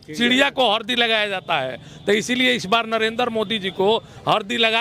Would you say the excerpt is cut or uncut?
uncut